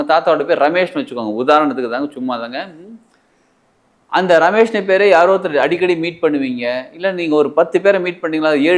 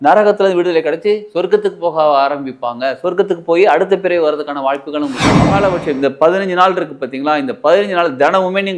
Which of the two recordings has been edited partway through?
second; 1 cut; at 5.4 s

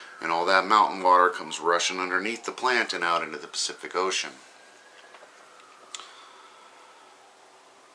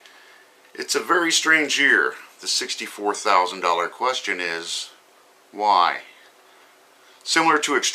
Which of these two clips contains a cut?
second; 1 cut; at 1.2 s

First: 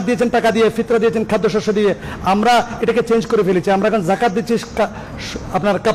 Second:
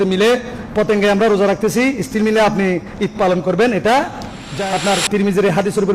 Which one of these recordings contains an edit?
second; 1 cut; at 4.5 s

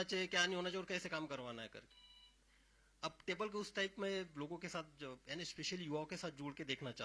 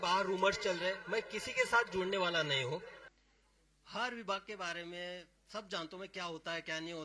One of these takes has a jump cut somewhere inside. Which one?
second; 1 cut; at 2.9 s

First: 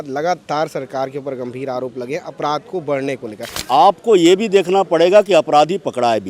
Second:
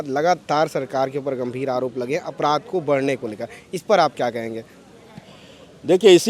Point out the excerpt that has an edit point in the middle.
first; 1 cut; at 3.6 s

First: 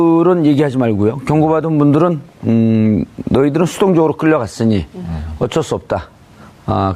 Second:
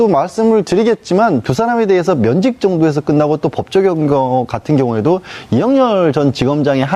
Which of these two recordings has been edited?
first; 1 cut; at 5.0 s

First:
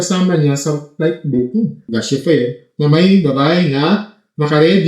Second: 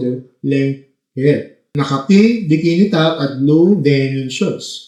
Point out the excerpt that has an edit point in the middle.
first; 1 cut; at 1.9 s

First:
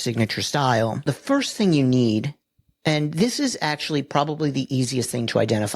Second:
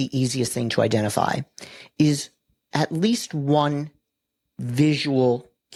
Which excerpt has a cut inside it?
first; 1 cut; at 1.0 s

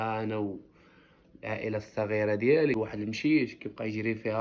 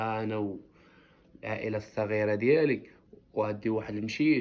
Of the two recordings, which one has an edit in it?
first; 1 cut; at 2.8 s

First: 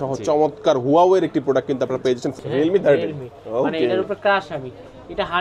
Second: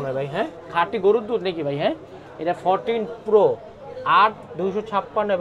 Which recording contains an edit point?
first; 1 cut; at 2.3 s

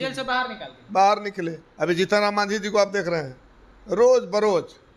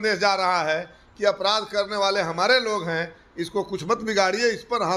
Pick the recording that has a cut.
first; 1 cut; at 1.2 s

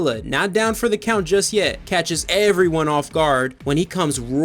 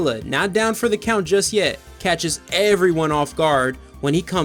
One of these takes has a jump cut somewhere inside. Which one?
first; 2 cuts; at 2.0 s, 3.5 s

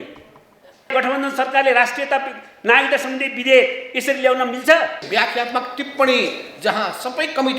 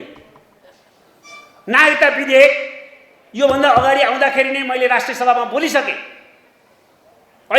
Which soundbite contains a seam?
first; 2 cuts; at 0.9 s, 5.0 s

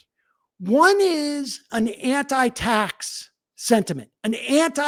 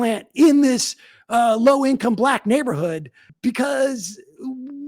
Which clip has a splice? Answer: second; 1 cut; at 3.2 s

